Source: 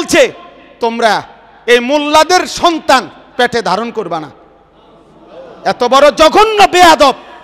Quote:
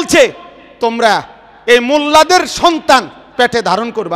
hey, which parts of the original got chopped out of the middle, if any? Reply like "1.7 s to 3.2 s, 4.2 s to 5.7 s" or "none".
none